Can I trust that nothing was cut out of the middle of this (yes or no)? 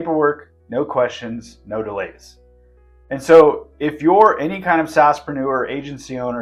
yes